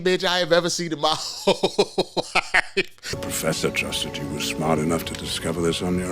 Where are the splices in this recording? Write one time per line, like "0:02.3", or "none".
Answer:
0:03.1